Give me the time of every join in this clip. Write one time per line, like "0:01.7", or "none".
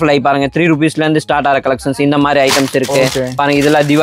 none